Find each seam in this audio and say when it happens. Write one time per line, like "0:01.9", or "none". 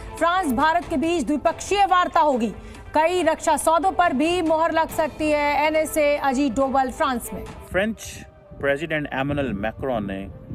0:07.3